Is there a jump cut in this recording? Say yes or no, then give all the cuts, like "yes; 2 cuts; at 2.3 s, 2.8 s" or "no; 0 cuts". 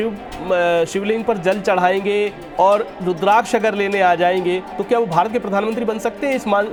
no; 0 cuts